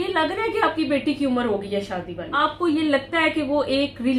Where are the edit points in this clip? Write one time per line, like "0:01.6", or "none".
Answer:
0:02.3

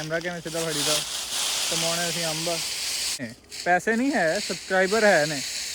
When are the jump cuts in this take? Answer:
0:03.3

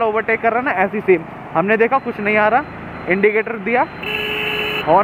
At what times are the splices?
none

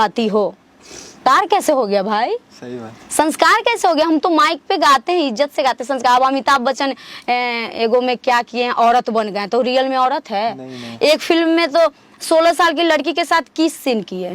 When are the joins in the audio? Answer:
0:01.1

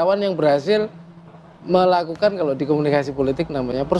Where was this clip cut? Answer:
none

